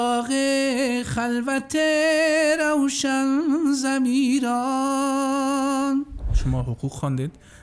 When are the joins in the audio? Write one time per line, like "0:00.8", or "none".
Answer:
0:06.3